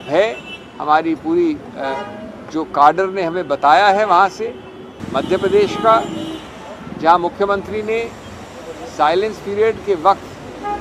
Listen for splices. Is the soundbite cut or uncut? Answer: cut